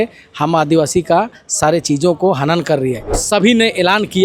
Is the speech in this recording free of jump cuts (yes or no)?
no